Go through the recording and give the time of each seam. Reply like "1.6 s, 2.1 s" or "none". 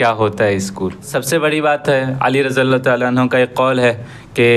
1.1 s